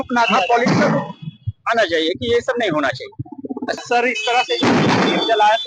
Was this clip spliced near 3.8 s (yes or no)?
yes